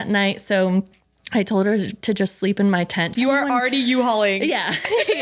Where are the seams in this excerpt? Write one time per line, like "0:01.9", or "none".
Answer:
0:03.2

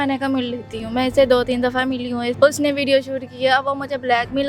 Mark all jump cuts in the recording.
0:02.3

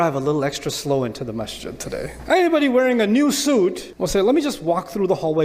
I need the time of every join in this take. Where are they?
0:02.2
0:03.9

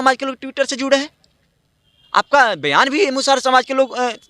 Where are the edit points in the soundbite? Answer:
none

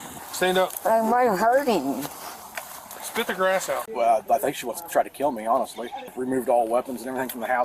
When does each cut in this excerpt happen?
0:03.9
0:06.1

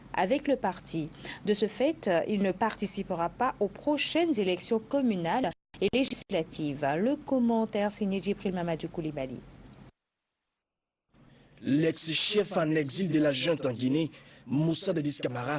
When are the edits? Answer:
none

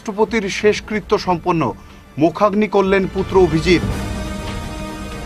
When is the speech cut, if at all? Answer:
none

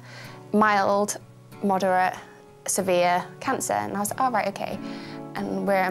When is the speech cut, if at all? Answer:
0:01.5

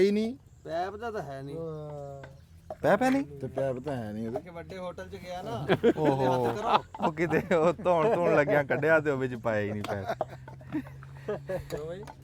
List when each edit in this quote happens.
none

